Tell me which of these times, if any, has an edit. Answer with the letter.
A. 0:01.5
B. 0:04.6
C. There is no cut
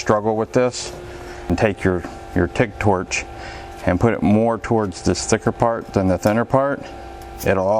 A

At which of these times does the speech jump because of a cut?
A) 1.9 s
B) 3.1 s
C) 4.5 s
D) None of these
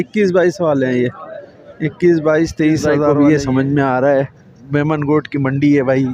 B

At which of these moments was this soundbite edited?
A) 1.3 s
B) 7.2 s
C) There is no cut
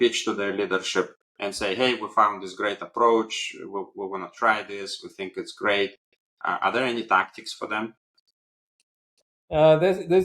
C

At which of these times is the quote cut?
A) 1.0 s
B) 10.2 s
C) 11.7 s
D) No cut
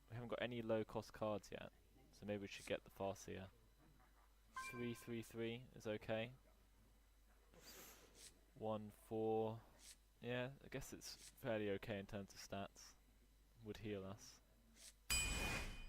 A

